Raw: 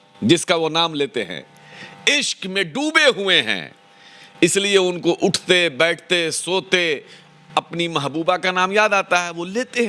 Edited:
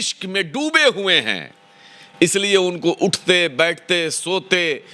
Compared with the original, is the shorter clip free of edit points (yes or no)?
yes